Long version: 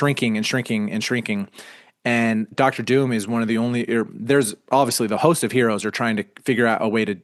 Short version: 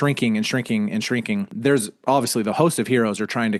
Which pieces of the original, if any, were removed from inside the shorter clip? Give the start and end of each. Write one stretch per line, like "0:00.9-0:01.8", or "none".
0:01.5-0:04.2